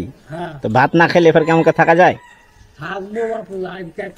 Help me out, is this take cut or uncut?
uncut